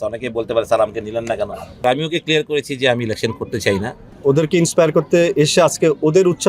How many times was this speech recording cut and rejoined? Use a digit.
2